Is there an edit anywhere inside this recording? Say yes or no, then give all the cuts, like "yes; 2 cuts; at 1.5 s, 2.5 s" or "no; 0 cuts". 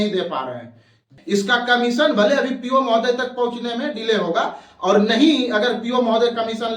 yes; 1 cut; at 1.1 s